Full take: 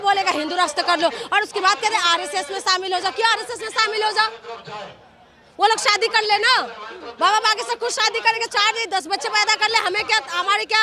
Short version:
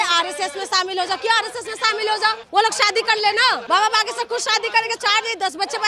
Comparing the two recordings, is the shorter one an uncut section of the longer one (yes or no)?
no